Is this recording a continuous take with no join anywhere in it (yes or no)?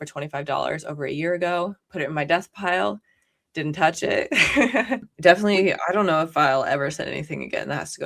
no